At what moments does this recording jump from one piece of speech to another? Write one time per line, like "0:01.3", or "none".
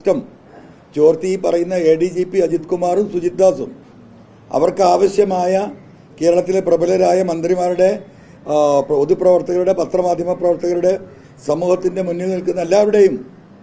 none